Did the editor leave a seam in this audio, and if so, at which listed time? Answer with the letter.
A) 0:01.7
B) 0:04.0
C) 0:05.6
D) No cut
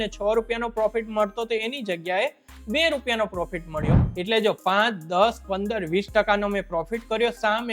B